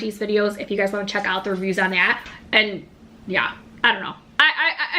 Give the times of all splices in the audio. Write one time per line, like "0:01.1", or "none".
0:02.3